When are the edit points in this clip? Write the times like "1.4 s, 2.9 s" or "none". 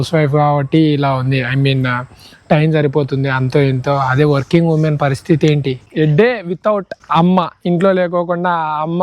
5.8 s, 7.0 s